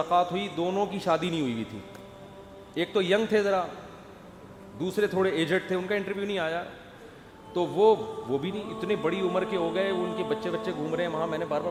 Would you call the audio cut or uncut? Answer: uncut